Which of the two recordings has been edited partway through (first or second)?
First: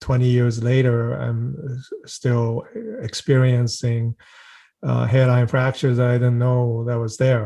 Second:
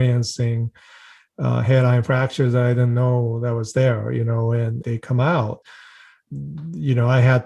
second